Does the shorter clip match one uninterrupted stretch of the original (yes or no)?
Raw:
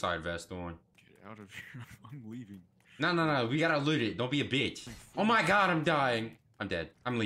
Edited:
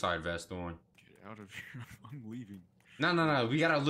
yes